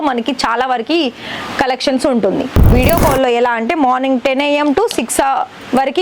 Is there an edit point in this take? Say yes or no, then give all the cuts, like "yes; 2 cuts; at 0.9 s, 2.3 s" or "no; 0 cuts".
yes; 1 cut; at 2.7 s